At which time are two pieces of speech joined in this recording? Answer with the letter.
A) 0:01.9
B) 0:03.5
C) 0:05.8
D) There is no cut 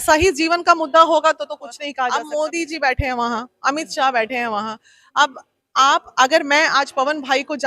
A